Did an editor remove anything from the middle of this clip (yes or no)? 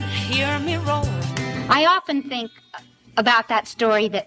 no